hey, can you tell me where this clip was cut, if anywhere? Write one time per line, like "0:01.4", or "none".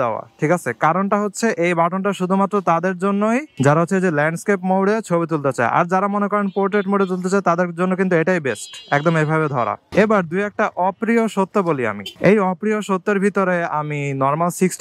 0:09.8